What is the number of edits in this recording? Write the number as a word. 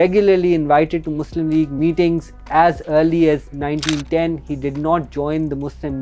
one